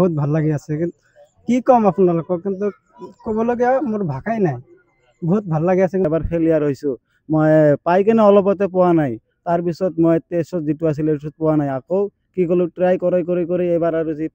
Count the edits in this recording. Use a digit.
1